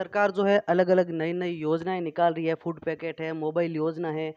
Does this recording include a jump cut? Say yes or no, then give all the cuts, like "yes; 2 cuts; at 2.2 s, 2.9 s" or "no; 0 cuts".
no; 0 cuts